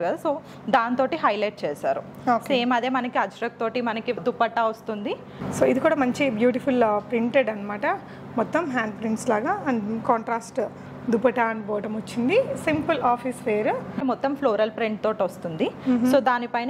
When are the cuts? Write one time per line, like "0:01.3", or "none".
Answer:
0:04.2
0:05.3
0:14.0